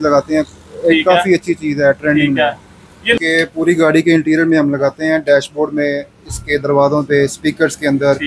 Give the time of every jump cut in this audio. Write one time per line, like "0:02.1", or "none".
0:03.2